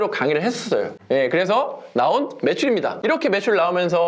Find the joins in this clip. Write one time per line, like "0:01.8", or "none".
none